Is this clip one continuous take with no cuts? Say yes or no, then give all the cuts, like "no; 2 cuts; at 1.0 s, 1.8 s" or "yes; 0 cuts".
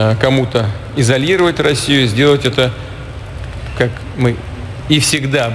yes; 0 cuts